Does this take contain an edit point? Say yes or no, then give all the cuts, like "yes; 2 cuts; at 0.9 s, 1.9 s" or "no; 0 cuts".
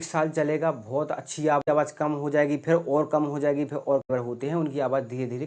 yes; 2 cuts; at 1.6 s, 4.1 s